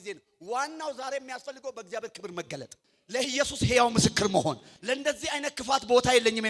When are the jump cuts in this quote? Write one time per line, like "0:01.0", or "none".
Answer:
0:03.3
0:04.7